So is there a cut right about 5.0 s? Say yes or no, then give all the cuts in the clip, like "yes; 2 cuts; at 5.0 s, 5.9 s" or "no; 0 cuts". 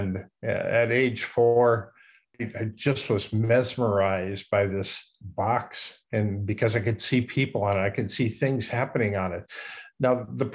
yes; 2 cuts; at 2.4 s, 5.0 s